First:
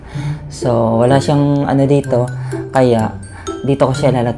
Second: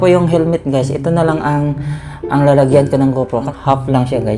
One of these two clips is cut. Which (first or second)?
second